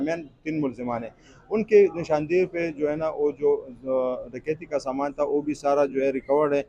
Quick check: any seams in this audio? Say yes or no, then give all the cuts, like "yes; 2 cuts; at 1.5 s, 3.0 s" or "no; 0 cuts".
no; 0 cuts